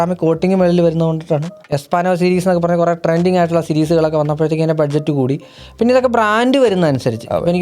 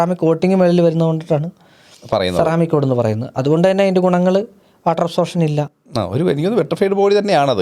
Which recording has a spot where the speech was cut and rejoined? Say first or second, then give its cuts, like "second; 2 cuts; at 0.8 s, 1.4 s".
first; 1 cut; at 1.7 s